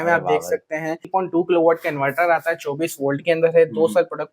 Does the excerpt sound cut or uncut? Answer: cut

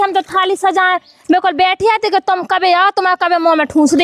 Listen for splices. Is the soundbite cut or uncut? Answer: uncut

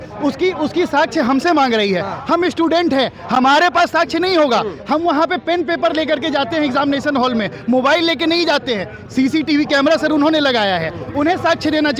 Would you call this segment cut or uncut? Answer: uncut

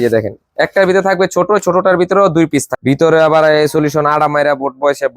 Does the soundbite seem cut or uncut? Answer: cut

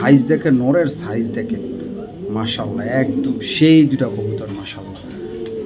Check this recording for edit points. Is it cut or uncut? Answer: uncut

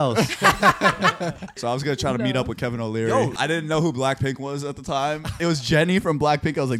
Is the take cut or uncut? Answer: cut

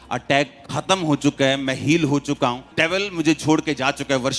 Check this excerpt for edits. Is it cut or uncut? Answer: cut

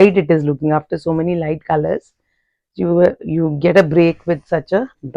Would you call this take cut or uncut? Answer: uncut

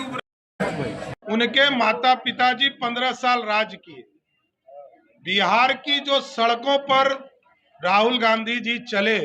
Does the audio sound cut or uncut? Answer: cut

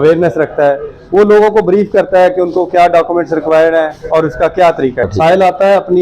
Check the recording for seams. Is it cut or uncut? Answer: cut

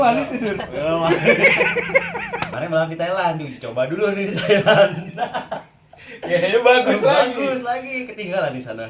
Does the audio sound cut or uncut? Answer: cut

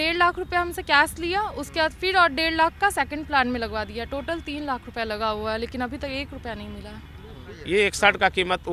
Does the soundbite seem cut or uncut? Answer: cut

